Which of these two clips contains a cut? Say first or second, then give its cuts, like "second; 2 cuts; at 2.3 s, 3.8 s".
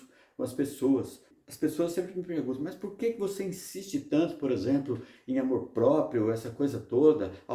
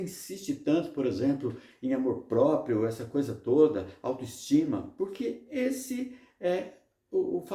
first; 1 cut; at 1.4 s